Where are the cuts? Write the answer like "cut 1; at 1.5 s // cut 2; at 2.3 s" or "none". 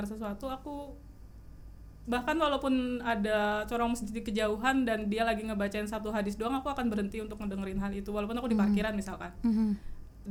none